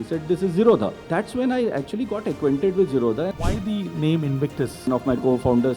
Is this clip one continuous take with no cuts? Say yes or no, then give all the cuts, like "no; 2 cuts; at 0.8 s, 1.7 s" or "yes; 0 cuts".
no; 3 cuts; at 1.0 s, 3.3 s, 4.9 s